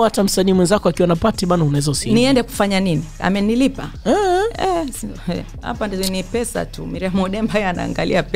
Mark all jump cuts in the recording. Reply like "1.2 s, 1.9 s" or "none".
none

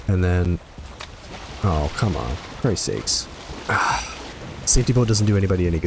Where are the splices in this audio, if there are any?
4.3 s

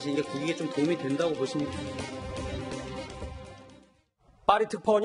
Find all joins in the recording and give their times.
none

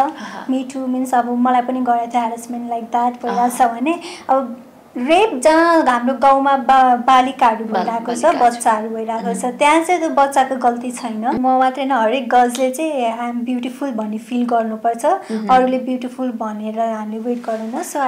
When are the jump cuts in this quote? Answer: 11.4 s

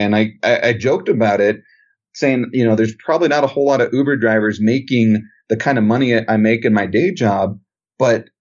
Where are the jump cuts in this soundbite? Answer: none

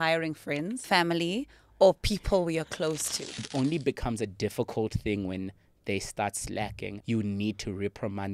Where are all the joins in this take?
0.8 s, 3.4 s, 6.9 s

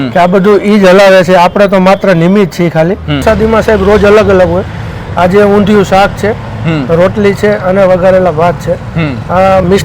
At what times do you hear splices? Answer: 3.2 s

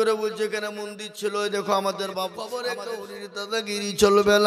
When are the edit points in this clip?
2.4 s

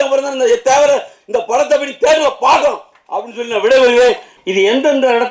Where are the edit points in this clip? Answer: 4.3 s

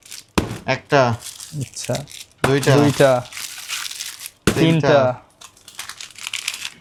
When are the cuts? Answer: none

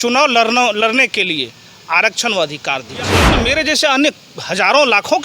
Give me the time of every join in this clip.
3.3 s

